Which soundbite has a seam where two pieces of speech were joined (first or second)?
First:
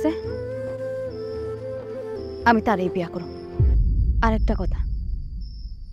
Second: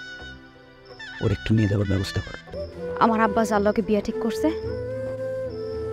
second